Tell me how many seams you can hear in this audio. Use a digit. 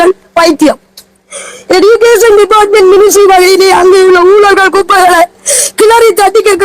0